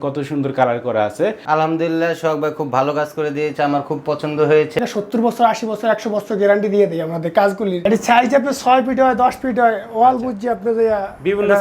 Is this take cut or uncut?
cut